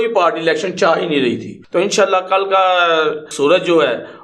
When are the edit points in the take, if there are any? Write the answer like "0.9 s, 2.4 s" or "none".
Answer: 1.5 s, 3.3 s

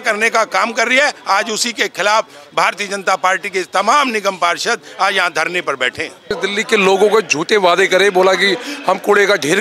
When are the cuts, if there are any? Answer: 6.4 s

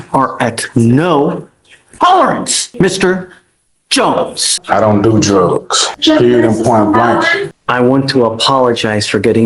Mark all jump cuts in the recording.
2.6 s, 4.6 s, 5.8 s, 7.5 s

